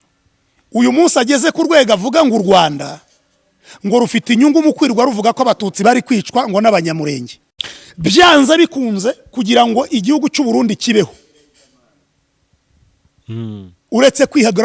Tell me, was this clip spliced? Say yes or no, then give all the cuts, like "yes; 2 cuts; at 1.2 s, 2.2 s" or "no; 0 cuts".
yes; 1 cut; at 7.5 s